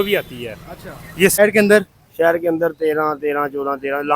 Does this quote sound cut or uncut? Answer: cut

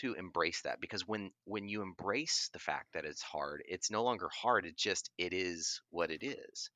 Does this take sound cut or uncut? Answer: uncut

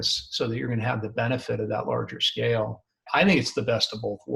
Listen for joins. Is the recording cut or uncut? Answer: cut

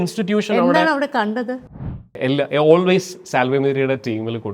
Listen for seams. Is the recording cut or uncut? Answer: cut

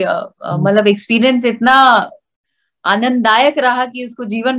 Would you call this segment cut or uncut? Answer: uncut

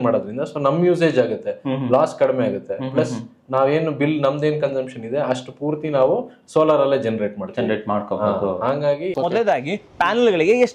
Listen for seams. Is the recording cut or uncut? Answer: cut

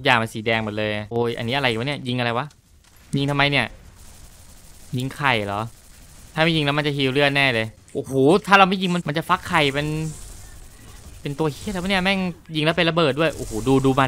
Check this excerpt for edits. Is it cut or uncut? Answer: cut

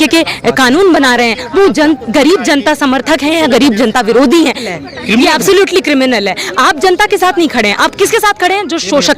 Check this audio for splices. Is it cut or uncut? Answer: cut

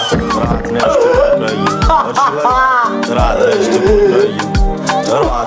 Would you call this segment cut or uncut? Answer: uncut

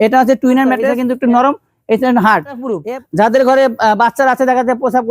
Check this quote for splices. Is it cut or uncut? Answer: cut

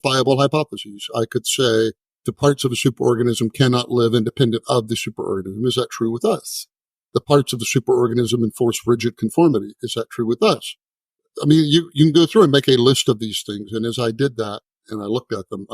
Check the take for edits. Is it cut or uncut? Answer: uncut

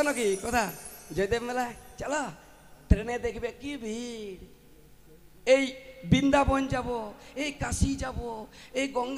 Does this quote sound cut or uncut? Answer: uncut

